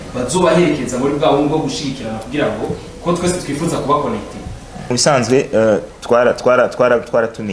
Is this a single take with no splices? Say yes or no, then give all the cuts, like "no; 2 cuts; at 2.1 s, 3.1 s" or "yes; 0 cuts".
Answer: no; 1 cut; at 4.9 s